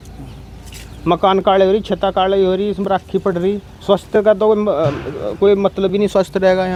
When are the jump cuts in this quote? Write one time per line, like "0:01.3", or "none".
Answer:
none